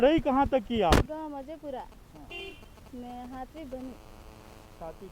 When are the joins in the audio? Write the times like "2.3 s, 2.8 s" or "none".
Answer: 1.1 s